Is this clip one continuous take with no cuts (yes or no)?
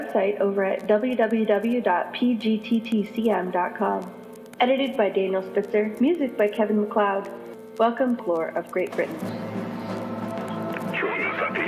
yes